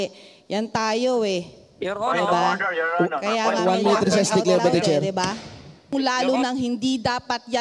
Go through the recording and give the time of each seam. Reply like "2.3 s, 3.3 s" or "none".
5.9 s